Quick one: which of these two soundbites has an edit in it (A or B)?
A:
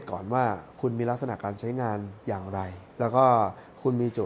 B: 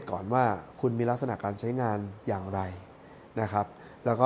A